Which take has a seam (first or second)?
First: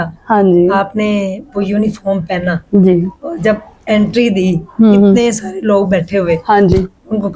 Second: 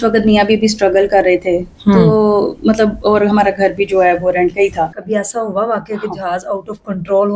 second